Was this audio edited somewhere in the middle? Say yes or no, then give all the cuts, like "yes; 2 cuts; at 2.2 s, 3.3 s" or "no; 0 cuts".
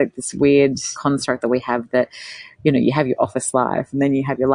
yes; 1 cut; at 0.9 s